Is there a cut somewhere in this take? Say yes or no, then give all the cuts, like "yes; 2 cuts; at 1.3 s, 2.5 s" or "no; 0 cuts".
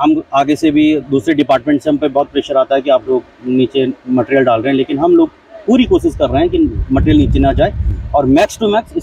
no; 0 cuts